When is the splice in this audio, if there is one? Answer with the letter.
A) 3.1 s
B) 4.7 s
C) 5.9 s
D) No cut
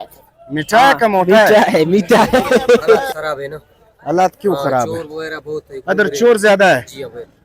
A